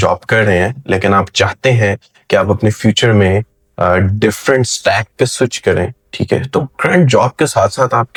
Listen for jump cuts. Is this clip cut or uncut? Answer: uncut